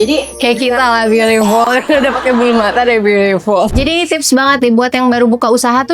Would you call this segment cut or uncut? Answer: cut